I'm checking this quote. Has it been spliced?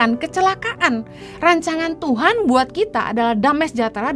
no; 0 cuts

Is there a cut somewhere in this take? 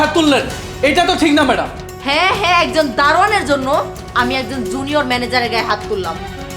no; 0 cuts

